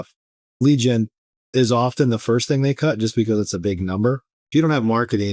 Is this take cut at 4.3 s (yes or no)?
yes